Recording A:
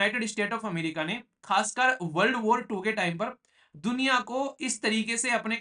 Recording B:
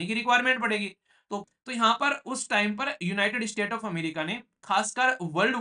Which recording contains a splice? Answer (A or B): B